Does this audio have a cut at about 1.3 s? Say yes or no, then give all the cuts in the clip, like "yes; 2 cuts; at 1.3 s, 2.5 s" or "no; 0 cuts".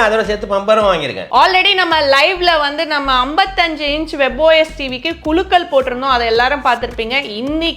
yes; 1 cut; at 1.3 s